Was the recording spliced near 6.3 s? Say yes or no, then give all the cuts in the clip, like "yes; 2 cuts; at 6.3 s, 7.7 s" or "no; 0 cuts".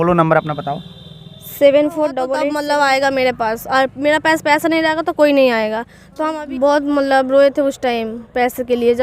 yes; 2 cuts; at 2.4 s, 6.3 s